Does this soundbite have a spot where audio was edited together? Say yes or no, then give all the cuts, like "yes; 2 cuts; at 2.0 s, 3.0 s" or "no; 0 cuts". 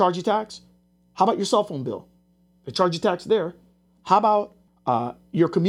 yes; 1 cut; at 4.6 s